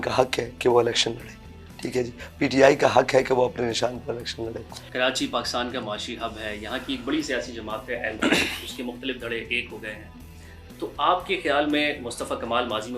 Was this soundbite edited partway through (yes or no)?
no